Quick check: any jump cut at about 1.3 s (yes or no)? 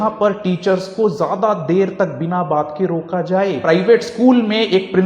no